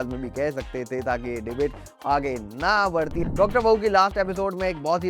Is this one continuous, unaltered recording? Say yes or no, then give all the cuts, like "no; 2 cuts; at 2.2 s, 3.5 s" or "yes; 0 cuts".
no; 1 cut; at 3.2 s